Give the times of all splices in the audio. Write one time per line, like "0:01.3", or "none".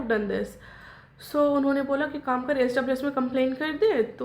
none